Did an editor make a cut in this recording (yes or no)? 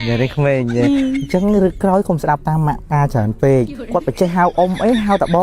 yes